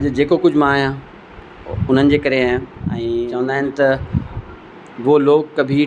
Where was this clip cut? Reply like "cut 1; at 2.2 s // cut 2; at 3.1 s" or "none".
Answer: cut 1; at 3.2 s